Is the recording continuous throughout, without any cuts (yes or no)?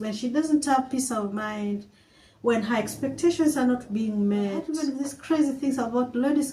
no